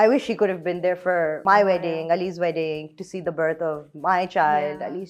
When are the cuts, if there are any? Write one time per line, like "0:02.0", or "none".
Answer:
0:01.4